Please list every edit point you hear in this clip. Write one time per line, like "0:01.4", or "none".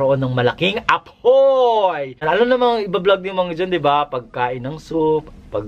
0:02.2